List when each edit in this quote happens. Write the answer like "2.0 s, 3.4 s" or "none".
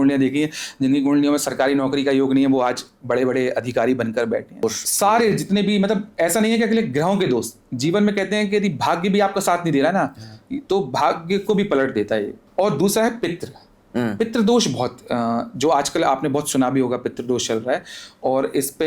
4.6 s, 12.4 s